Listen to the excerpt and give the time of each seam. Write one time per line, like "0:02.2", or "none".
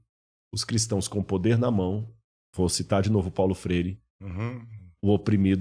none